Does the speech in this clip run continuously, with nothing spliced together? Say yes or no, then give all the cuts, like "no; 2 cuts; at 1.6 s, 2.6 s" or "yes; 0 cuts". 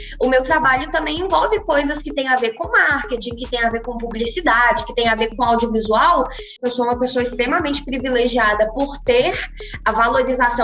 no; 1 cut; at 6.4 s